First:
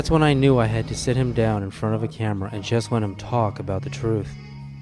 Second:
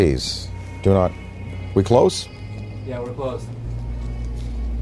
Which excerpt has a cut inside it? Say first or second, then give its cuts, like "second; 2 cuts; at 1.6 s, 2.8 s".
first; 1 cut; at 2.8 s